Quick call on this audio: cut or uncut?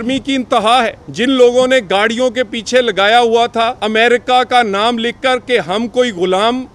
cut